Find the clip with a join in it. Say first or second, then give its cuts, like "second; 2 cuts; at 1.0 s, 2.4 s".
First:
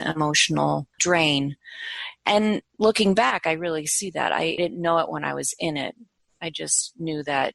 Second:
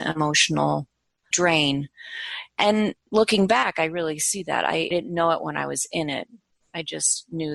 first; 1 cut; at 0.9 s